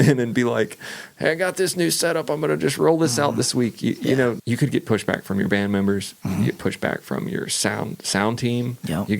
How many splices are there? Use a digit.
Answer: 1